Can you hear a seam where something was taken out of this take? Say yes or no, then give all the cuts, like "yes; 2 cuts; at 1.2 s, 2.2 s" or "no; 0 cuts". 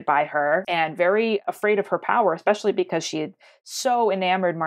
yes; 1 cut; at 1.5 s